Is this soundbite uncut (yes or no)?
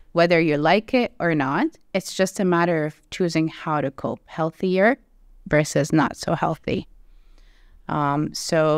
yes